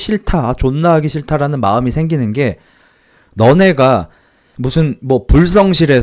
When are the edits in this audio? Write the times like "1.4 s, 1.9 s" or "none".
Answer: none